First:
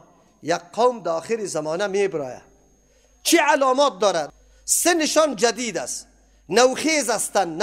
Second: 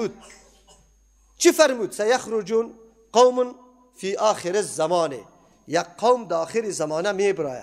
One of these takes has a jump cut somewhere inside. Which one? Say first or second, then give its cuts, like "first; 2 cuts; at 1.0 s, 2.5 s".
first; 1 cut; at 4.3 s